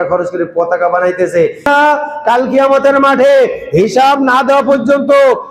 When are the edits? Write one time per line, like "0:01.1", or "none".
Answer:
0:01.7